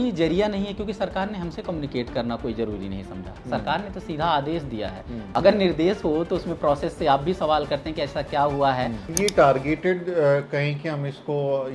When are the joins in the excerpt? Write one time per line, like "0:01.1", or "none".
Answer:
0:05.1
0:09.1